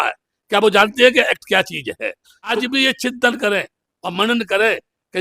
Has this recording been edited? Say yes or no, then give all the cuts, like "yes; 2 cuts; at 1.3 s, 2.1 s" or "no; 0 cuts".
yes; 1 cut; at 2.5 s